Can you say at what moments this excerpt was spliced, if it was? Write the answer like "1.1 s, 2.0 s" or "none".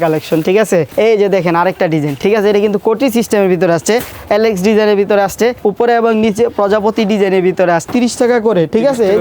0.9 s, 2.2 s, 4.1 s, 5.6 s, 7.9 s